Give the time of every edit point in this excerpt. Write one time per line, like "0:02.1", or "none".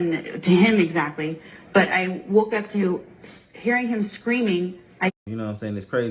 0:05.1